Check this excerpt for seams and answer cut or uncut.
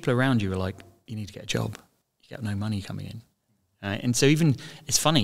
cut